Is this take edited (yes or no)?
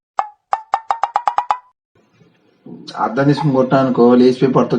no